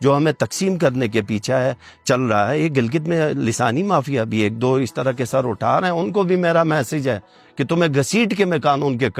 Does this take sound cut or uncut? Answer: uncut